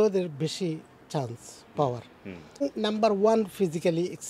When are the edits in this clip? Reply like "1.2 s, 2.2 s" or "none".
2.6 s